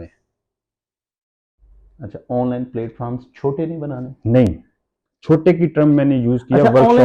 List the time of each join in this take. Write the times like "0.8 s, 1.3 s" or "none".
none